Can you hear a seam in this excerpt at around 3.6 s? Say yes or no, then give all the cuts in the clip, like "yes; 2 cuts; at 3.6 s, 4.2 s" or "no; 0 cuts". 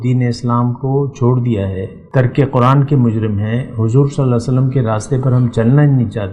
no; 1 cut; at 1.9 s